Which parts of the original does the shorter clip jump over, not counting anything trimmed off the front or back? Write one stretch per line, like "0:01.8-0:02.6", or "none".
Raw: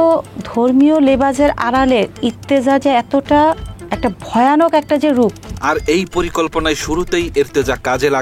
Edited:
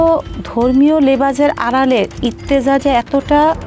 none